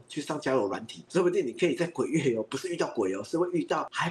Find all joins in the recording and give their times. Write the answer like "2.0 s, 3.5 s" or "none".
none